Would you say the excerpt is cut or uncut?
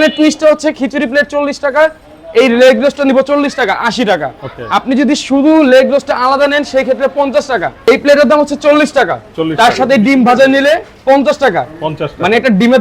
cut